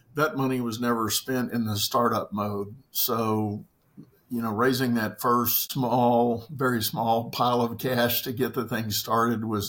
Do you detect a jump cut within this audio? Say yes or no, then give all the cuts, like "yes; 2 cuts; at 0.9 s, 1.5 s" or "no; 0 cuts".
yes; 1 cut; at 5.6 s